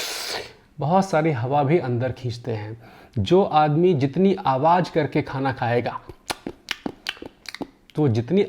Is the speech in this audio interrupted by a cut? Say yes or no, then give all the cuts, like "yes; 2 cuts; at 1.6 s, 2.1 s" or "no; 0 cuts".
no; 0 cuts